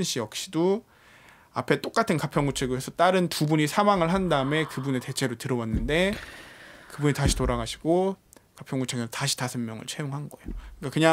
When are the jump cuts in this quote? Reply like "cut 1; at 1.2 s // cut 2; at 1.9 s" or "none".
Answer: none